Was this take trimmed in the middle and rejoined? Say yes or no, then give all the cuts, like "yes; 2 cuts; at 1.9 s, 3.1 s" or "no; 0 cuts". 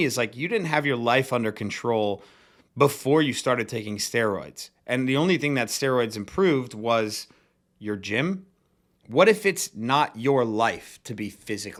no; 0 cuts